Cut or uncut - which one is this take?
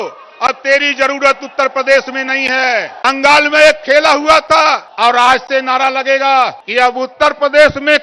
cut